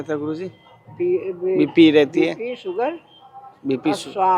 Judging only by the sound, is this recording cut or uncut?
uncut